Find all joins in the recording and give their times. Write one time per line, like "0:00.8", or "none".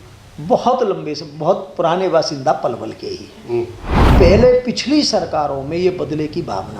0:04.1